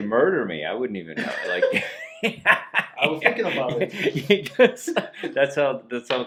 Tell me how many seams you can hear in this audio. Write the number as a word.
zero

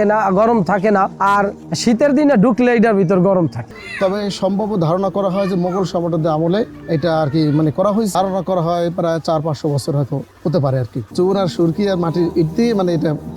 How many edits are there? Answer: three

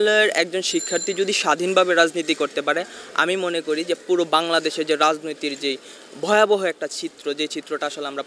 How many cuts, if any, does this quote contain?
zero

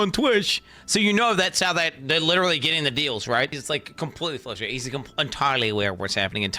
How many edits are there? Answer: one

